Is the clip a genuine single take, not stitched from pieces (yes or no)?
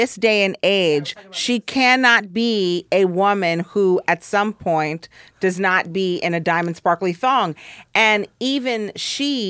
yes